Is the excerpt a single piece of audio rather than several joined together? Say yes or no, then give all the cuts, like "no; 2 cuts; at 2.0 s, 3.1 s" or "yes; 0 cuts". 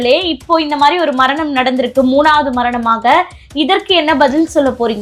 yes; 0 cuts